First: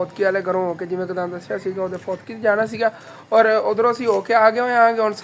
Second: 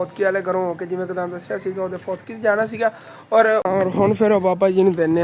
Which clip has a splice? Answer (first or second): second